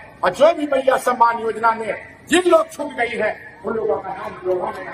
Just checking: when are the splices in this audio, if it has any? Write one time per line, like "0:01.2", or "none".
none